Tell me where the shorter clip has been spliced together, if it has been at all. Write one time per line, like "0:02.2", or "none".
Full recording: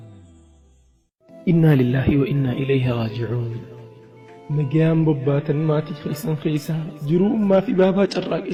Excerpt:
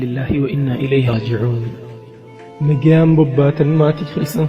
0:01.1